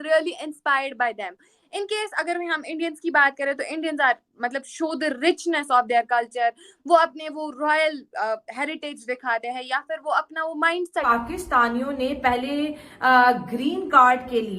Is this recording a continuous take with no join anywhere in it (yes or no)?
no